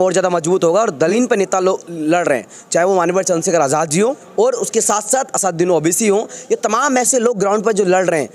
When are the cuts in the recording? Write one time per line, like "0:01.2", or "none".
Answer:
0:01.1
0:04.2